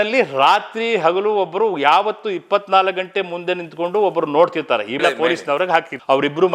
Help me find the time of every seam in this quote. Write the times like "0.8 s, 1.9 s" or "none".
5.0 s